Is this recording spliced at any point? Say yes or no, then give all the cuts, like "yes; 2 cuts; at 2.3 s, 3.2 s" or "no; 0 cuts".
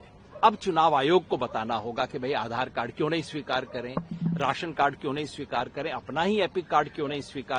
no; 0 cuts